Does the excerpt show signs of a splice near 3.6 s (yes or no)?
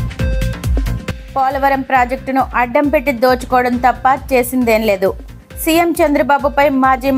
no